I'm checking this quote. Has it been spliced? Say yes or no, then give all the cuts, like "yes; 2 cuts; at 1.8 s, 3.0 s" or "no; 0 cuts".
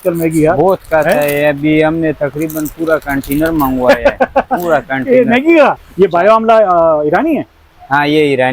yes; 1 cut; at 5.8 s